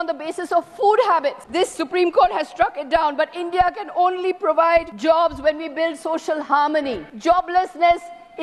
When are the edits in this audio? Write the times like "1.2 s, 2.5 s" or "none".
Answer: 1.4 s, 4.9 s, 7.1 s